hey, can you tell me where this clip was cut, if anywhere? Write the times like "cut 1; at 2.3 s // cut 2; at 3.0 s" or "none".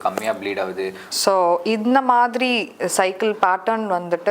cut 1; at 1.0 s